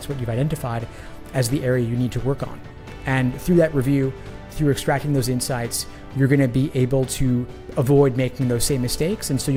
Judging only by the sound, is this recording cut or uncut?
uncut